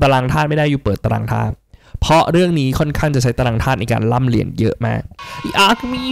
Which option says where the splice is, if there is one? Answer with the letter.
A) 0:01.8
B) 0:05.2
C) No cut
B